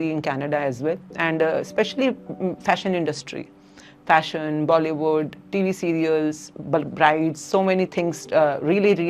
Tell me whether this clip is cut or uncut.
cut